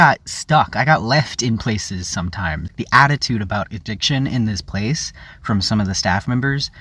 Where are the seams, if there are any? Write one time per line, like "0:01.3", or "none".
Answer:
0:02.7